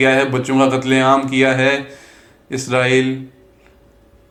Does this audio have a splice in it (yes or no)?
no